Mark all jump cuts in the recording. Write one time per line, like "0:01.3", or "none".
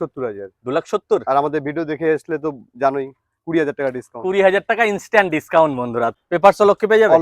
0:06.2